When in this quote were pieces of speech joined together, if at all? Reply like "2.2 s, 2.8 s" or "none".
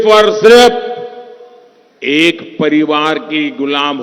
none